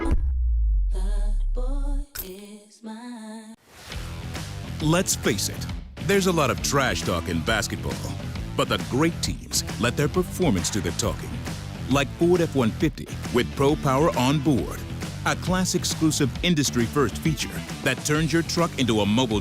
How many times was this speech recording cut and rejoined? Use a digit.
1